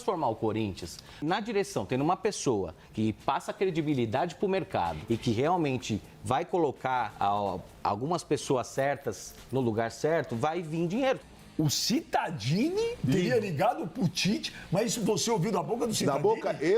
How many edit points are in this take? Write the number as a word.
five